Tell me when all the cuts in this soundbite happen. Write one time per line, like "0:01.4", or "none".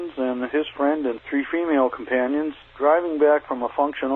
0:01.2
0:02.6